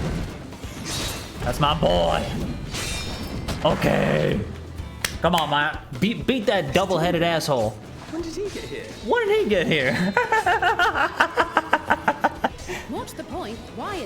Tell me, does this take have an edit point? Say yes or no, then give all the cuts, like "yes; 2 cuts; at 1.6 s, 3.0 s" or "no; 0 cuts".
yes; 1 cut; at 12.5 s